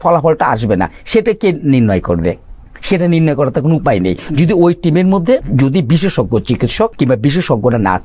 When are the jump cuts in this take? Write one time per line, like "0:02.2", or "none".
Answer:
0:05.5
0:06.9